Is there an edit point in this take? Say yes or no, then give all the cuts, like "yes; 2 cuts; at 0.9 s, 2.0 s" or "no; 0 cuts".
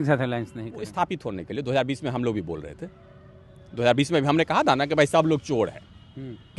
no; 0 cuts